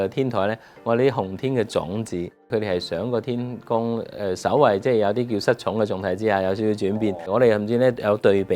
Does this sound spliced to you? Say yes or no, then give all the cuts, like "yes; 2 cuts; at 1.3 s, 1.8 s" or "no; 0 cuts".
yes; 2 cuts; at 2.5 s, 7.3 s